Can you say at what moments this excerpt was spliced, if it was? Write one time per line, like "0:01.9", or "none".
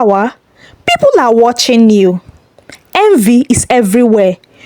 none